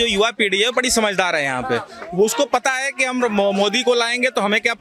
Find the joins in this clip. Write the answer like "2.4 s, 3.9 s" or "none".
none